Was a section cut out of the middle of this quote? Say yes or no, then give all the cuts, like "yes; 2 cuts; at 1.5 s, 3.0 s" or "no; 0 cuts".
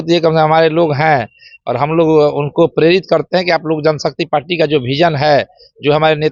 no; 0 cuts